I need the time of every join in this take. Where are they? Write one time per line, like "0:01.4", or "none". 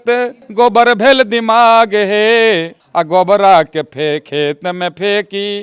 none